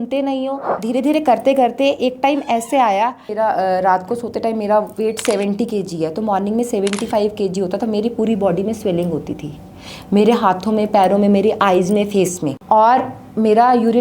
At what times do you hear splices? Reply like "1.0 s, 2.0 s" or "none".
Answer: 0.8 s, 3.3 s, 12.5 s